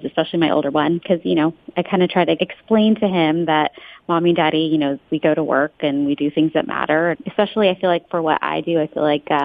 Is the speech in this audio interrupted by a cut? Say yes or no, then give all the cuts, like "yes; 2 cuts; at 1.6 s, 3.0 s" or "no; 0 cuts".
yes; 3 cuts; at 1.0 s, 2.4 s, 7.2 s